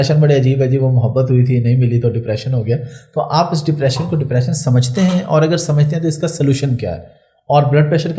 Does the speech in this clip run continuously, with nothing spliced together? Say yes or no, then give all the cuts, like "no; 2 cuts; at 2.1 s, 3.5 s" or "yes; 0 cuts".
yes; 0 cuts